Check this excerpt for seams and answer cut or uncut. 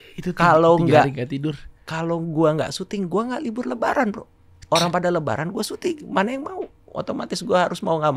uncut